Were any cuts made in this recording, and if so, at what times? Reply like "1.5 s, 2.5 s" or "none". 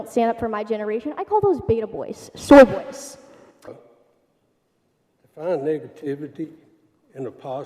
3.8 s